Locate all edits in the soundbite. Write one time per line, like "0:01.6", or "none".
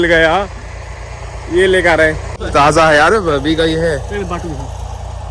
0:02.3